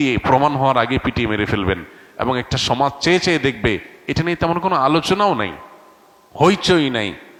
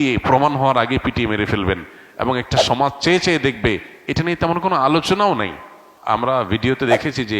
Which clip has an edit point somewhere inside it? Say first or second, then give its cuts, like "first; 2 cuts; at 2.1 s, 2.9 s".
second; 1 cut; at 5.9 s